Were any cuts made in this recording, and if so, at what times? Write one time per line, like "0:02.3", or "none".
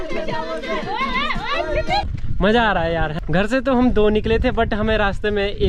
0:02.2
0:03.1